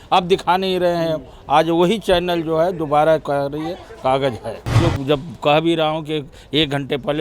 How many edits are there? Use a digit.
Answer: 1